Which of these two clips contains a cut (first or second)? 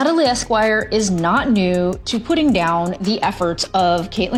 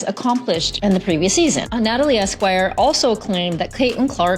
second